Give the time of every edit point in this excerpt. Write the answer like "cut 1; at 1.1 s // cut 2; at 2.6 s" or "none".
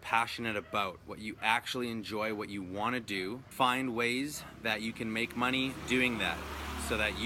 cut 1; at 3.4 s